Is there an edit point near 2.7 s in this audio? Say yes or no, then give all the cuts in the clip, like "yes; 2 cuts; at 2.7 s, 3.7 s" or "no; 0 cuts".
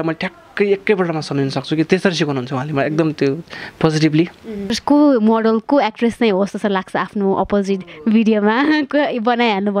no; 1 cut; at 4.8 s